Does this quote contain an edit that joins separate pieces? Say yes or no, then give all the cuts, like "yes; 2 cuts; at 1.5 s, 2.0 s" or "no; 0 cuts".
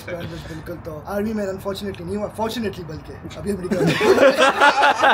yes; 1 cut; at 1.0 s